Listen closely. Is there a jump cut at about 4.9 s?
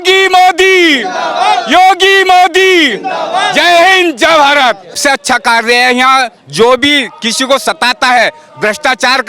yes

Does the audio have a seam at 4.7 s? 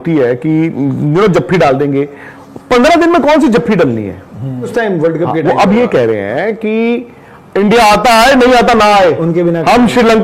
yes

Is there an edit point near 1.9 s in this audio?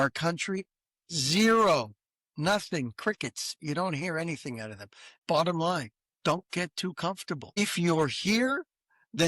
no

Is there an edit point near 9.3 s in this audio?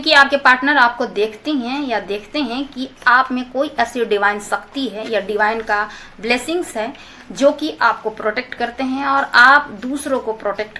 no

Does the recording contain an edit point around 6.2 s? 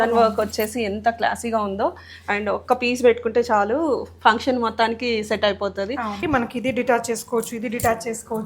yes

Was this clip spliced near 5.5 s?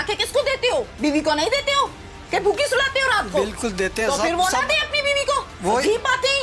yes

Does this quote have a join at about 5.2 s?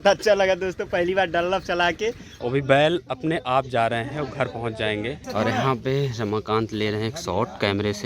yes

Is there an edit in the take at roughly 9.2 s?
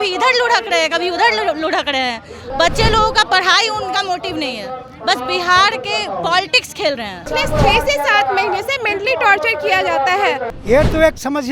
no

